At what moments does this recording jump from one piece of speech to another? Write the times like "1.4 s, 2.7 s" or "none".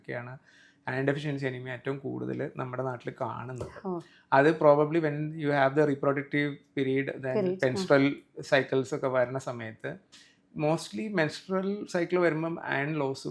none